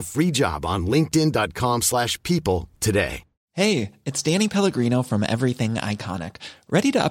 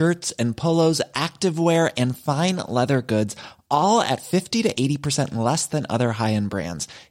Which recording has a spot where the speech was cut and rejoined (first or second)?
first